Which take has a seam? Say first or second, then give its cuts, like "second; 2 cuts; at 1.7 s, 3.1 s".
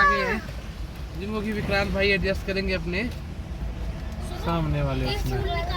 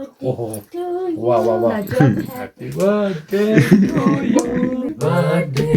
second; 1 cut; at 4.9 s